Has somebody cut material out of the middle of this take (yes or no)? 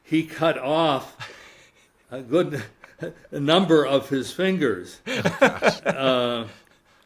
no